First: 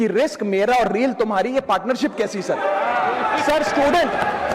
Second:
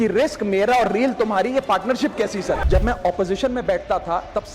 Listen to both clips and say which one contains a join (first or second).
second